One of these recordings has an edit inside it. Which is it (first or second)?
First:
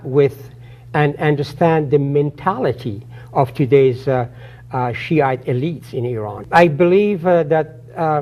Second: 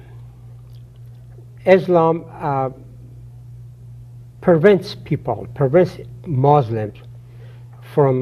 first